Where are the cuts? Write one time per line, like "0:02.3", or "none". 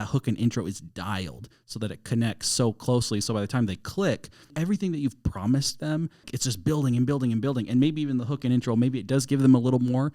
0:04.5
0:06.3